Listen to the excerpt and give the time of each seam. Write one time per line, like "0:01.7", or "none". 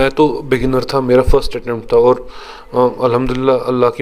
none

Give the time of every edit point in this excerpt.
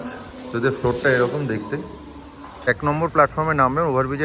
0:02.7

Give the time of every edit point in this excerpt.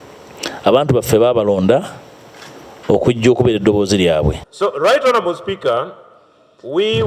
0:04.5

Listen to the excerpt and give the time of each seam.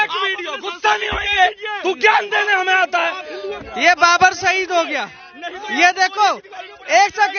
0:03.4

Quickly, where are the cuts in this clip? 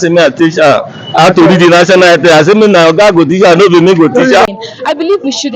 0:04.5

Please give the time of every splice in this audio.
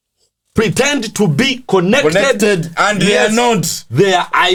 none

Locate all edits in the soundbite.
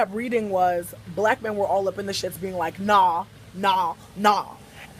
0:01.5

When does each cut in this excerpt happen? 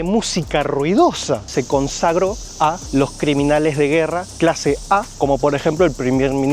0:01.5
0:02.8
0:04.3
0:05.1

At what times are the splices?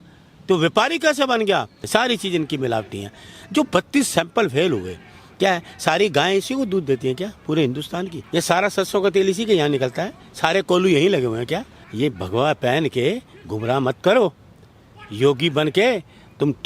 0:01.8
0:08.2
0:11.8

